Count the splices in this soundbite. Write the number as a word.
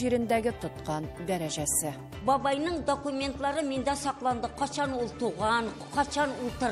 one